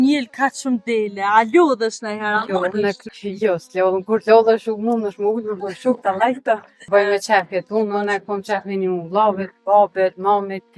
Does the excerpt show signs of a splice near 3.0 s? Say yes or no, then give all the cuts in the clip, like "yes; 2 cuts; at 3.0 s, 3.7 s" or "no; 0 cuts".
yes; 3 cuts; at 3.0 s, 6.9 s, 9.5 s